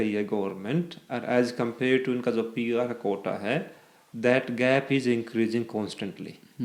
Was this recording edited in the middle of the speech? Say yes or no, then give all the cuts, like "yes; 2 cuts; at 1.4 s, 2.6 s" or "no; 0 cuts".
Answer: no; 0 cuts